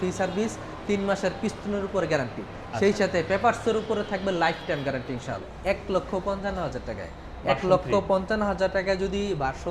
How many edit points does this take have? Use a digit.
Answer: 1